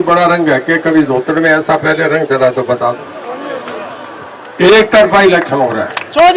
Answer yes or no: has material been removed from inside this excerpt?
no